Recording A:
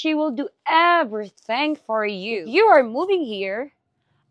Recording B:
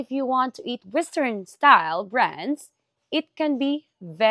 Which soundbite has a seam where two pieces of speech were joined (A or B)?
A